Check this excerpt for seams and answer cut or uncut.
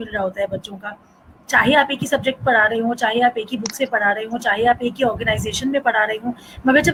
uncut